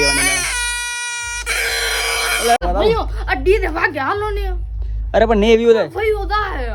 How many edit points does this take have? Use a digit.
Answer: 1